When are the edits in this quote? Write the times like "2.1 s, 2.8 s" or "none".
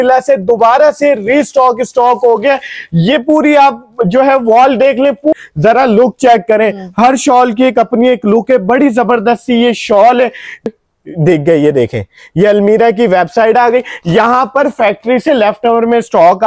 5.3 s, 10.7 s

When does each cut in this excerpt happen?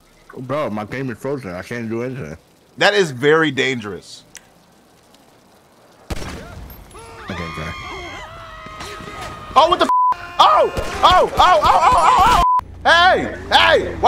4.3 s, 12.4 s

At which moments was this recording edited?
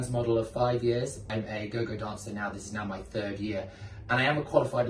1.3 s

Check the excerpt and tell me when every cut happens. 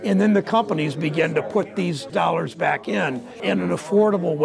2.1 s, 3.4 s

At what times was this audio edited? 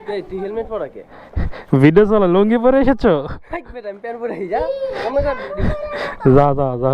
none

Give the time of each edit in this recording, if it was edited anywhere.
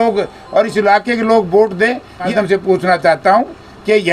2.3 s

